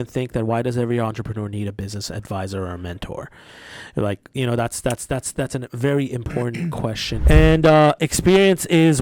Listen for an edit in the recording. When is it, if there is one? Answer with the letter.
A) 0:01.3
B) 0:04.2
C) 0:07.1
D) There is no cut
C